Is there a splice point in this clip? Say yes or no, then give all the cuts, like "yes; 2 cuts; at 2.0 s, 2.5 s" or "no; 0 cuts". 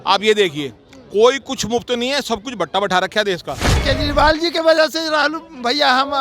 yes; 1 cut; at 3.8 s